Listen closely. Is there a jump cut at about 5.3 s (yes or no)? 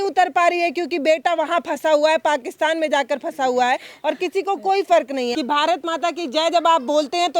yes